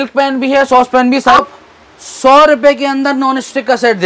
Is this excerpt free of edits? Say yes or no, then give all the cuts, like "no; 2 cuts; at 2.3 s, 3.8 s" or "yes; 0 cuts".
no; 1 cut; at 1.4 s